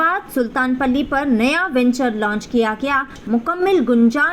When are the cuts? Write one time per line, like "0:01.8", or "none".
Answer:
0:03.2

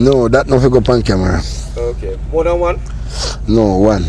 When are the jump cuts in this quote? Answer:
none

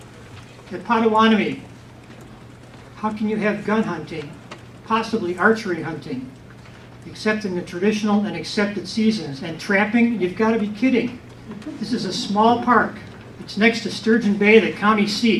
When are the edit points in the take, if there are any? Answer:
none

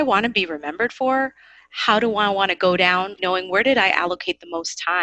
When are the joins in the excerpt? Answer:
none

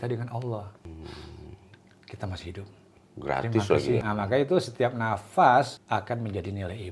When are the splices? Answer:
0:00.9
0:02.9
0:04.0
0:05.8

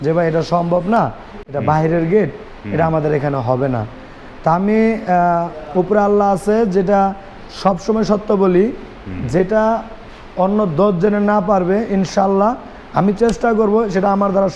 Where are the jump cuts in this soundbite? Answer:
none

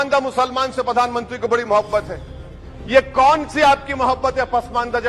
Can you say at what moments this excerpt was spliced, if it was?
none

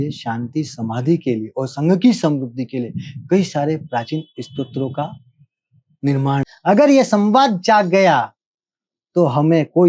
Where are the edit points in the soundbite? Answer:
0:06.5

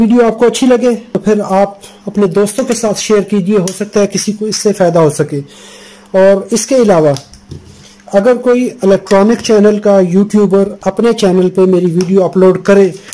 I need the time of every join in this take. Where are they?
0:01.0

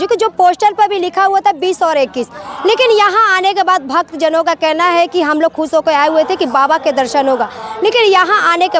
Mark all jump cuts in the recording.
none

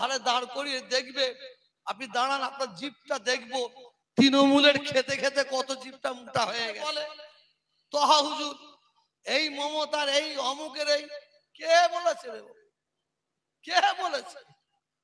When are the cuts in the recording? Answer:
0:06.9

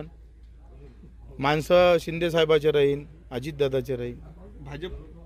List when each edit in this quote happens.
none

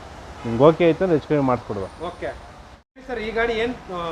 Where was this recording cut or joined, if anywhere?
0:02.7

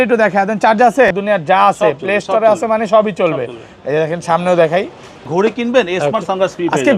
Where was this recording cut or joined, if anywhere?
0:01.1
0:05.2

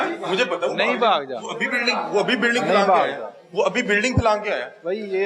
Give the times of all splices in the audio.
none

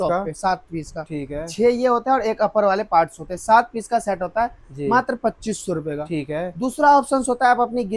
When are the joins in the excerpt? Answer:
none

